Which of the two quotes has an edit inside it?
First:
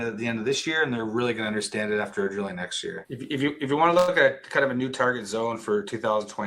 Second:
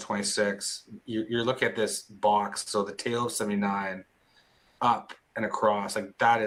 first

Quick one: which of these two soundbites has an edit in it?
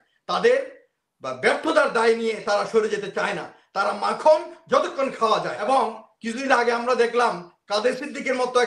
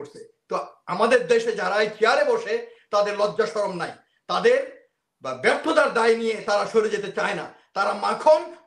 first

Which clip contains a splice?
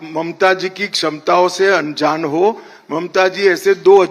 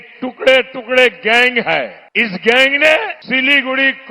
second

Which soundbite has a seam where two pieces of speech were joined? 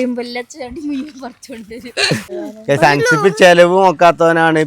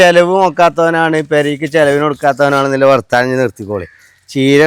first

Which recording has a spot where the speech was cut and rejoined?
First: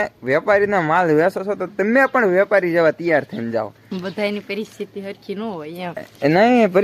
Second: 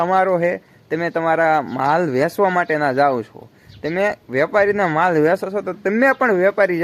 first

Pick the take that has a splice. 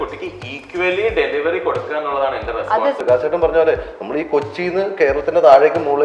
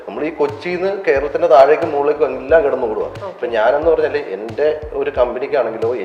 first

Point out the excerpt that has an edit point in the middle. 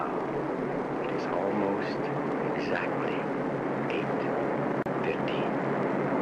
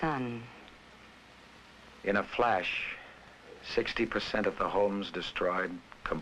first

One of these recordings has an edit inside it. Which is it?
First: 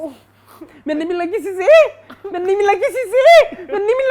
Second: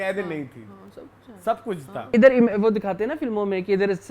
second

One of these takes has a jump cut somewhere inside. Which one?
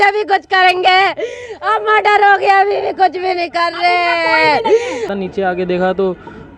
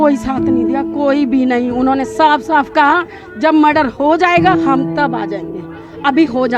first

